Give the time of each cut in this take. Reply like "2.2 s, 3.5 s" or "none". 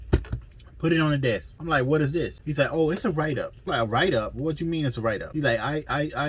1.5 s, 2.4 s, 3.5 s, 5.3 s

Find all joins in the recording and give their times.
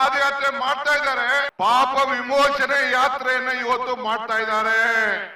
1.5 s

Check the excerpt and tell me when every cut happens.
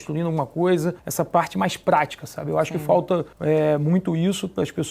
1.0 s, 3.3 s

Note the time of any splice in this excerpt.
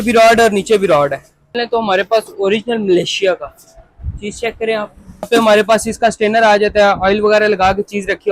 1.6 s, 5.3 s

